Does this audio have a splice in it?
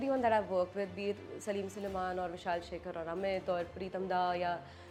no; 0 cuts

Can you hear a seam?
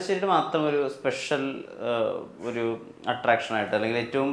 no; 0 cuts

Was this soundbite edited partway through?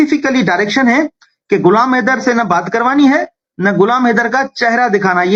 no; 0 cuts

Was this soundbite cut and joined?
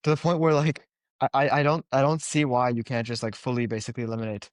no; 0 cuts

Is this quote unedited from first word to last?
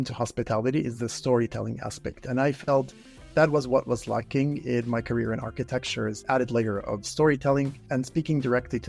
no; 2 cuts; at 6.2 s, 7.8 s

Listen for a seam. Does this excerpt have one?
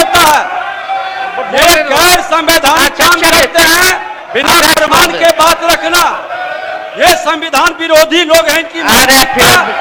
no; 0 cuts

